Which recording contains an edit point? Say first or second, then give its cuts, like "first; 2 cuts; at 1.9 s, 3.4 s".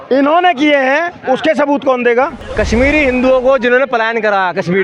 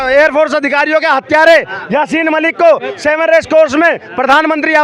first; 1 cut; at 2.4 s